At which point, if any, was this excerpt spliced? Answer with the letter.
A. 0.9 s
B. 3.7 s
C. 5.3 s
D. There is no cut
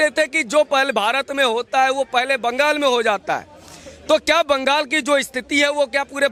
D